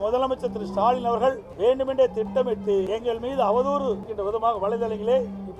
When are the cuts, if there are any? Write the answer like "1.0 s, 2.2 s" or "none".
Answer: 1.5 s, 2.9 s, 4.1 s

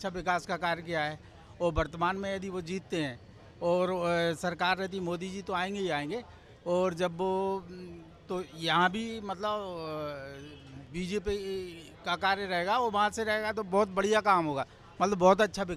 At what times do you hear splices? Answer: none

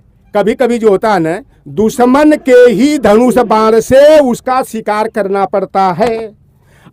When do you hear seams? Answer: none

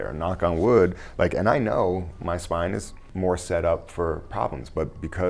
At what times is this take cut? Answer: 3.0 s

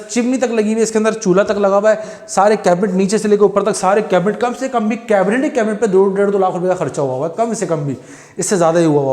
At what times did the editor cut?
none

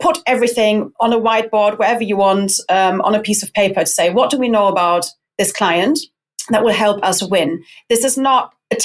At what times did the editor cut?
none

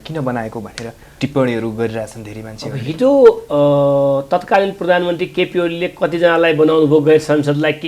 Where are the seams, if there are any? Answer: none

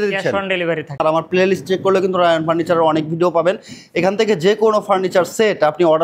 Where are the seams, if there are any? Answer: 1.0 s

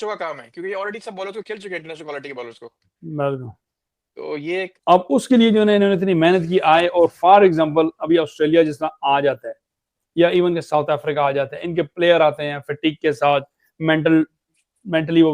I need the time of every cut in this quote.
4.7 s

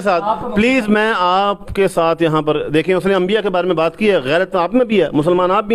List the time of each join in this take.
none

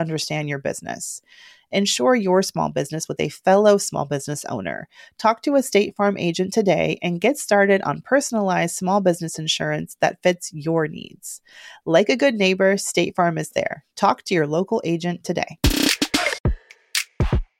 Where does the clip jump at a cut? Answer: 16.5 s

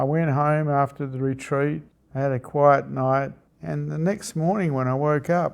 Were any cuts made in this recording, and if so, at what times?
1.9 s, 3.4 s

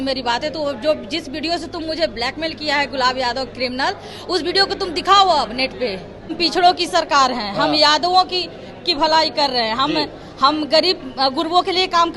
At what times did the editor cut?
6.3 s

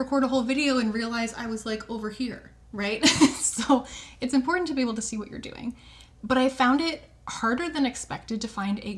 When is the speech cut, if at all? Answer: none

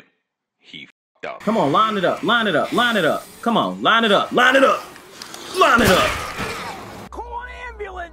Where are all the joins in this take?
0.9 s, 7.1 s

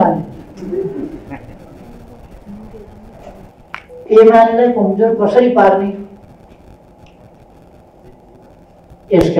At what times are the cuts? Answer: 3.5 s

